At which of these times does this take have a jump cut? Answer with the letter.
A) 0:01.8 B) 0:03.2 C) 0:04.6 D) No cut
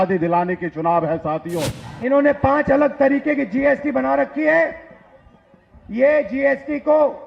A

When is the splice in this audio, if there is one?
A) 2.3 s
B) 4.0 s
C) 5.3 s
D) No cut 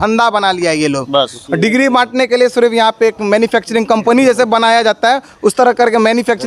D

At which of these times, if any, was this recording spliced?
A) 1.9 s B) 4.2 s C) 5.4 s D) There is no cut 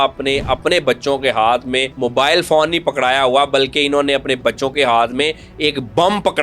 A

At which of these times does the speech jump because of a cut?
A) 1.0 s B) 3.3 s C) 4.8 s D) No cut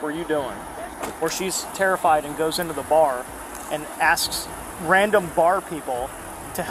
A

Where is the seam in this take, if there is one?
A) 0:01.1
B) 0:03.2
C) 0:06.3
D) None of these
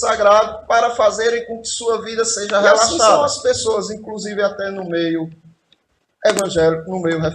B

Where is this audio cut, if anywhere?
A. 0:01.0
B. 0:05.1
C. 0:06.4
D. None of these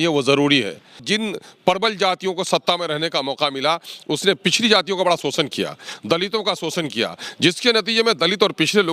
A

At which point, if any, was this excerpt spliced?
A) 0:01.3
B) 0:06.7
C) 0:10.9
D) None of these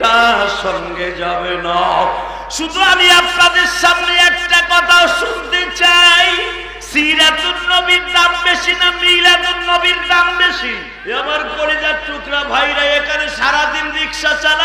C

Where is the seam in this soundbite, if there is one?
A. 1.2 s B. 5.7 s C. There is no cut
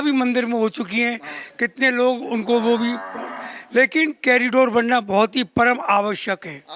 C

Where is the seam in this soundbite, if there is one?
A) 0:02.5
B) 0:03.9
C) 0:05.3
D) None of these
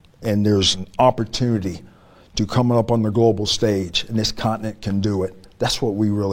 D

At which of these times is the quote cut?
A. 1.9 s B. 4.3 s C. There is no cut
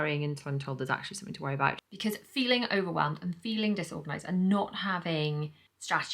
A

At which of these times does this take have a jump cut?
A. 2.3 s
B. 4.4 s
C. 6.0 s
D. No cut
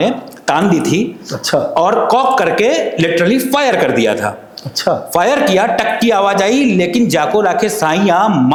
D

